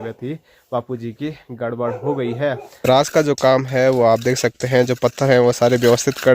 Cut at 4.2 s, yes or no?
no